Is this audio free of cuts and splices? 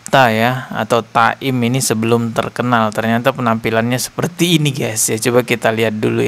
yes; 0 cuts

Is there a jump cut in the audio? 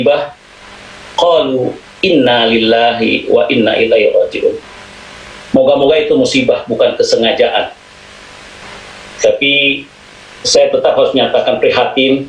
no; 0 cuts

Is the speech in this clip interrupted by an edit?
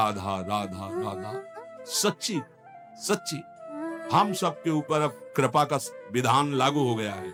no; 0 cuts

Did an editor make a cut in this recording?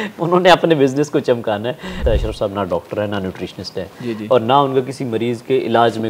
yes; 1 cut; at 2.0 s

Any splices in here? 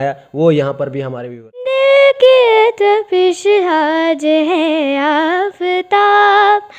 yes; 1 cut; at 1.7 s

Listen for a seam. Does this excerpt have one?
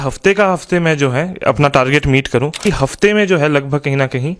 yes; 1 cut; at 2.6 s

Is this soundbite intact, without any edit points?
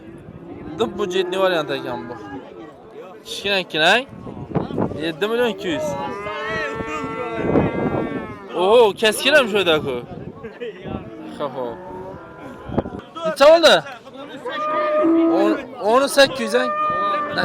yes; 0 cuts

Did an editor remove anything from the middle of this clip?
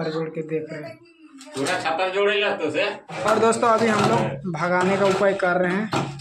yes; 1 cut; at 3.1 s

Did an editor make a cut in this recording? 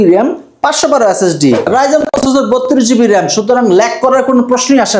yes; 1 cut; at 1.6 s

